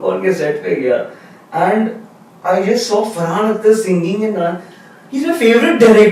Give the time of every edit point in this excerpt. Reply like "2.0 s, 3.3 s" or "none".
none

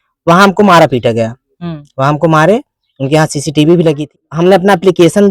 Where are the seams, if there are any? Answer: 4.3 s

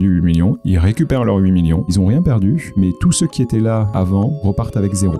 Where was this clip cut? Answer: 1.9 s, 2.7 s, 4.1 s

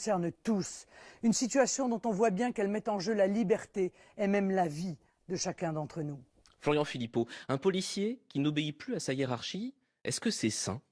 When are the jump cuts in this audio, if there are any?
7.2 s

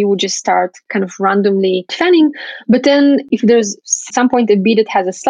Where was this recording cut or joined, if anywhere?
1.9 s, 3.3 s

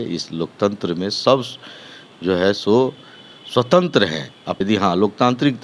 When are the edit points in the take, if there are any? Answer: 4.5 s

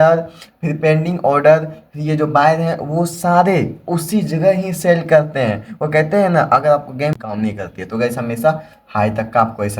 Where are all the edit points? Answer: 7.2 s

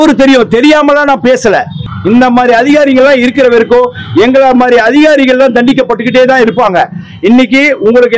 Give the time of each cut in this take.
1.8 s

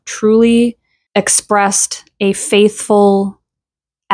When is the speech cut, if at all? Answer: none

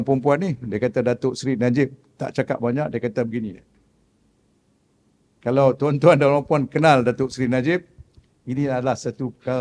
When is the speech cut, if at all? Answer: none

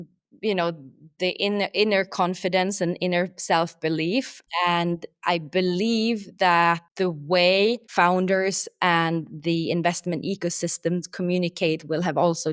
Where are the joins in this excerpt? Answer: 1.1 s, 4.4 s, 6.9 s, 7.8 s

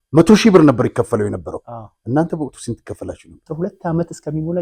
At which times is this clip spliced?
3.4 s

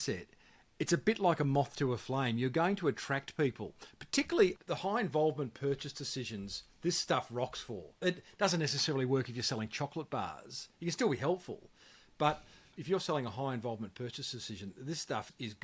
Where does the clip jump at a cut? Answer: 12.7 s

